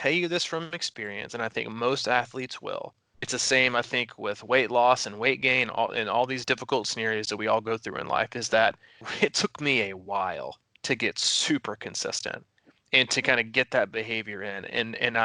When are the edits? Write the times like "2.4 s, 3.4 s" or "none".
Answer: 3.2 s, 6.4 s, 9.0 s